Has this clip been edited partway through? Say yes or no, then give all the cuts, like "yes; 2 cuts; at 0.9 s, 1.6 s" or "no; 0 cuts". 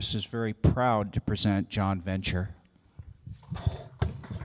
yes; 1 cut; at 1.8 s